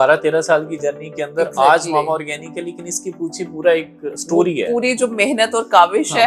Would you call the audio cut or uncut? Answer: uncut